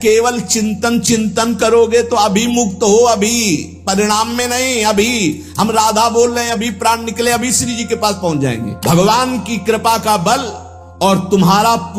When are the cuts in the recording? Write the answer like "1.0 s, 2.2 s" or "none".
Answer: 8.8 s